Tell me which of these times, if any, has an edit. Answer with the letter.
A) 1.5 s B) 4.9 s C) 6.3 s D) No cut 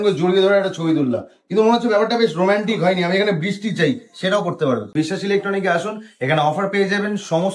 B